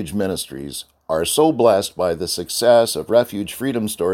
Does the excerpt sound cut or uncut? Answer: uncut